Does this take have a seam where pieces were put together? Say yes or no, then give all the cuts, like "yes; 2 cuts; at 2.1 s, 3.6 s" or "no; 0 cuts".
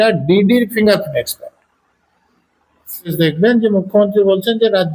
yes; 1 cut; at 3.1 s